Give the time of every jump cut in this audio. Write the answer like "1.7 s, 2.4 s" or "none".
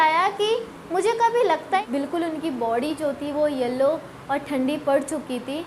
1.8 s